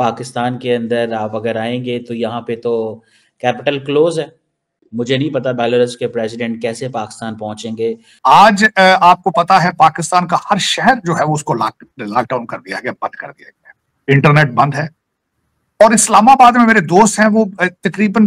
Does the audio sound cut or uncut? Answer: cut